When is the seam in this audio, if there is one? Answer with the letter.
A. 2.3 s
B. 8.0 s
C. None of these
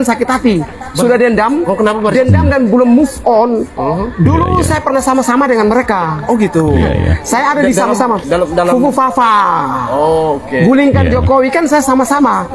C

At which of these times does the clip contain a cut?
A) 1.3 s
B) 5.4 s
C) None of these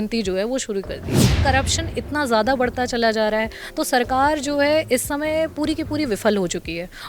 A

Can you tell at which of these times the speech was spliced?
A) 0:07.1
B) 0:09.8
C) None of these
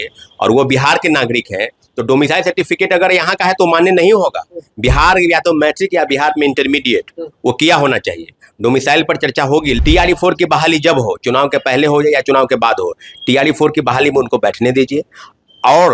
B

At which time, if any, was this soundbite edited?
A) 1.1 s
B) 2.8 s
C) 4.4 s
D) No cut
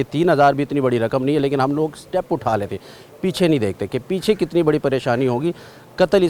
D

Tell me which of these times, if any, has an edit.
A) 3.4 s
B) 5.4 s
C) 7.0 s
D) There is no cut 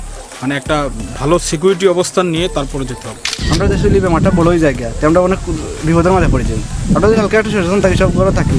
A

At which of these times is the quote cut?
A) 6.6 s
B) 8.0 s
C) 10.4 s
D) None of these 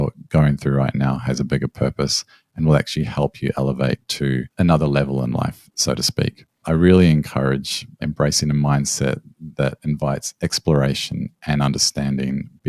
A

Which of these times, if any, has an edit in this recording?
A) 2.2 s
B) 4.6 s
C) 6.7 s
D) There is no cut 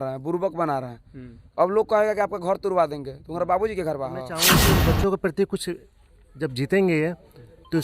B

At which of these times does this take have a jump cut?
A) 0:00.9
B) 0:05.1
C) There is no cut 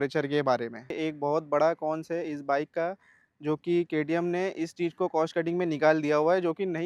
A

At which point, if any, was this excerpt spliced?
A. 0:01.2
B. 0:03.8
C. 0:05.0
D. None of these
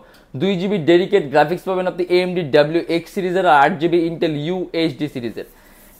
D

